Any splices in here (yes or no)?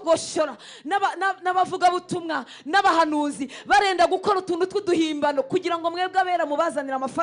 no